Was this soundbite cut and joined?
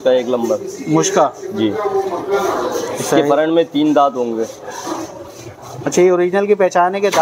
no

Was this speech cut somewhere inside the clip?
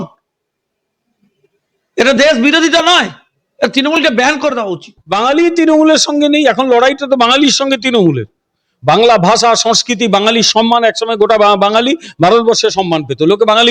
yes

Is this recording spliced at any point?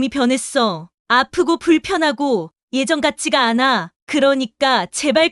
no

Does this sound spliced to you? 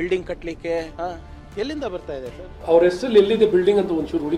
no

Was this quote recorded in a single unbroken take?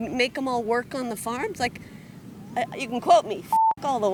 yes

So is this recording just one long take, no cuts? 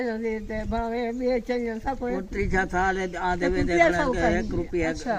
yes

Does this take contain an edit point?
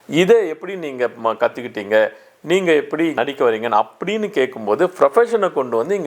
no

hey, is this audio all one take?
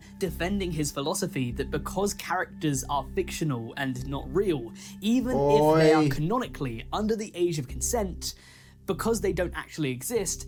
yes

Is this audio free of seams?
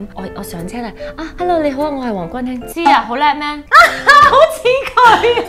yes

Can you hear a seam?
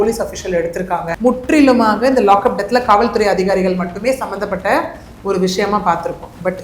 yes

